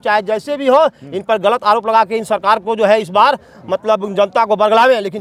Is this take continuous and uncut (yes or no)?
yes